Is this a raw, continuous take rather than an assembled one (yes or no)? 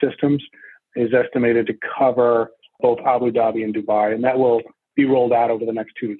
yes